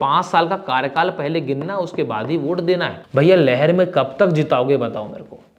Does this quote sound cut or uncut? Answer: cut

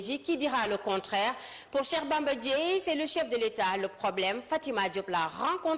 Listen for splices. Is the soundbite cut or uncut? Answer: cut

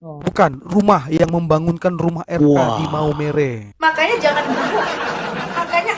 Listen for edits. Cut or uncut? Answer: cut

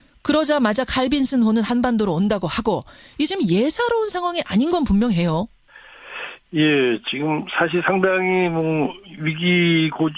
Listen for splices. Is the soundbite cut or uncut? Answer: cut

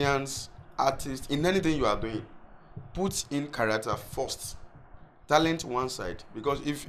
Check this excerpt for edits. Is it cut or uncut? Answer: uncut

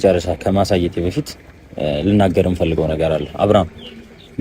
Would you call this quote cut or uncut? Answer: uncut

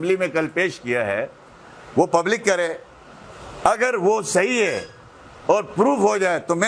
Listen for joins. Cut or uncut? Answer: uncut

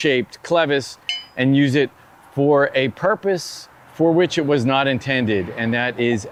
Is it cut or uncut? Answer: uncut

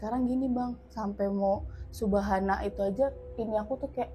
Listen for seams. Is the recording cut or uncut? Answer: uncut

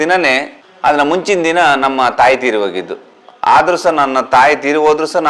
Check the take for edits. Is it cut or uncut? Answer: uncut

